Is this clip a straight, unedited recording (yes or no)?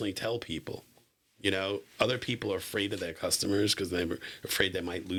yes